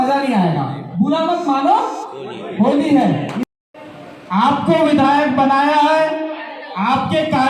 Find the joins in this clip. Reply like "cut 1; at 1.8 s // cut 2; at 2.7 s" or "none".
cut 1; at 3.4 s